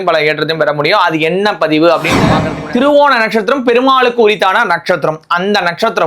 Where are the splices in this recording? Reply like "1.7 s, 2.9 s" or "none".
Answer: 2.5 s